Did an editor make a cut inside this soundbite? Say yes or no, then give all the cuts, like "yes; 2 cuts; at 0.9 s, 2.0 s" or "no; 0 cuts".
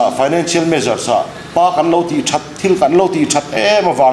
yes; 1 cut; at 1.4 s